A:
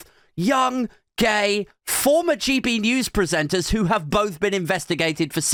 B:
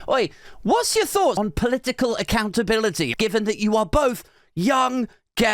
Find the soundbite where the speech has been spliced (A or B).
B